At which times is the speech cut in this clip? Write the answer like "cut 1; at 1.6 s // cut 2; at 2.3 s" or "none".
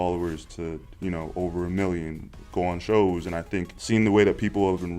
cut 1; at 3.7 s